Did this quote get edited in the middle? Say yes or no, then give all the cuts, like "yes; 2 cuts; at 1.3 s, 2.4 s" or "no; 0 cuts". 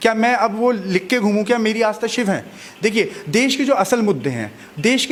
no; 0 cuts